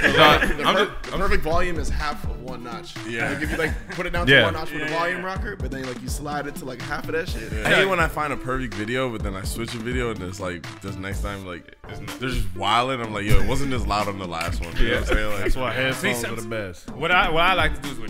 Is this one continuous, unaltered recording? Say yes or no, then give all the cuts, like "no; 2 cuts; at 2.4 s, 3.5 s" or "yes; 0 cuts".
no; 1 cut; at 7.6 s